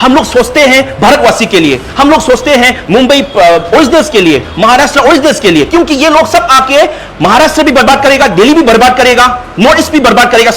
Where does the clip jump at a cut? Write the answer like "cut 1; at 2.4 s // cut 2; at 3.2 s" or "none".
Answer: none